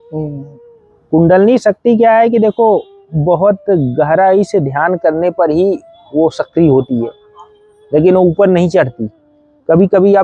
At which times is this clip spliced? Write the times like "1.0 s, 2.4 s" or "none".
none